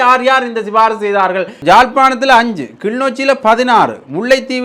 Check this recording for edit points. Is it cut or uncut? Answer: cut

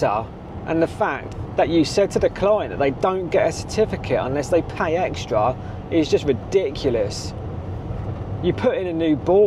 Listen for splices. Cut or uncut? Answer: uncut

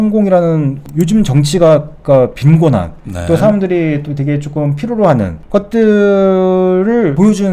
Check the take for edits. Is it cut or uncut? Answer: uncut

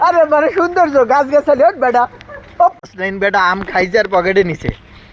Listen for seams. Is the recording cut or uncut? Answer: cut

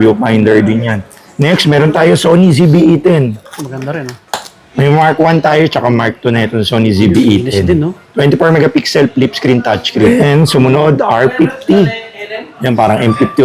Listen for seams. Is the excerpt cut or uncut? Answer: cut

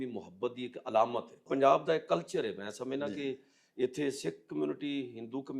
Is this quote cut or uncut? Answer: cut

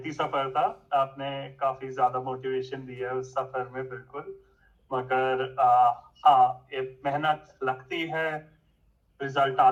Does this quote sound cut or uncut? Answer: uncut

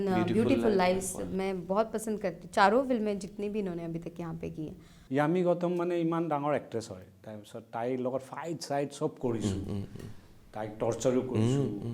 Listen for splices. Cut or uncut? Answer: cut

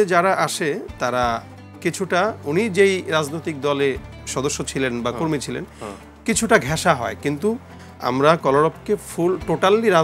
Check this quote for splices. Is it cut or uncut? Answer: uncut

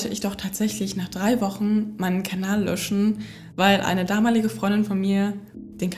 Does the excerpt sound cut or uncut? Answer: uncut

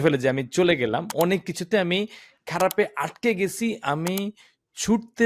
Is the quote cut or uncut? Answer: cut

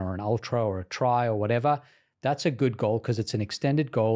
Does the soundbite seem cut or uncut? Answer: uncut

